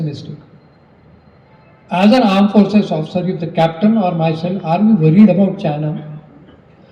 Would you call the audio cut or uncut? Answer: uncut